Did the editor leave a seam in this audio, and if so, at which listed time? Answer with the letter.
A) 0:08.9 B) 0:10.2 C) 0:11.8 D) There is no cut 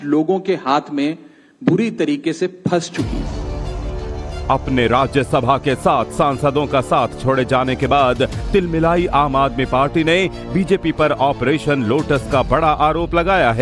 D